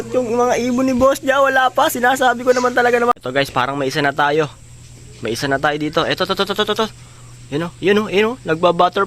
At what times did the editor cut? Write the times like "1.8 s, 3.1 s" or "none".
3.1 s